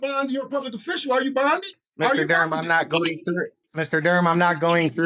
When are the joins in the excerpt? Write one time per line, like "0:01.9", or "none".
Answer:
0:01.8
0:03.6

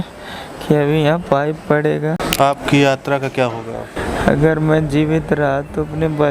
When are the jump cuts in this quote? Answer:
0:02.3
0:04.0

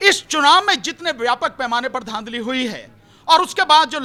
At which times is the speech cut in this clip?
none

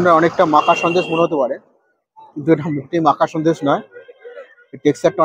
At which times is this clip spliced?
none

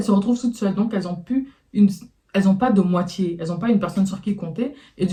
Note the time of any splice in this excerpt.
none

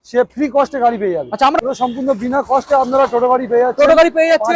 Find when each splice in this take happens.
0:01.6

